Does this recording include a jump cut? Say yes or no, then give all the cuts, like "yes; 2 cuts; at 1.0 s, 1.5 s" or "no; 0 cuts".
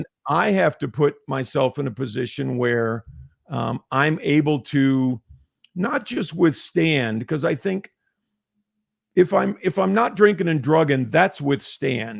no; 0 cuts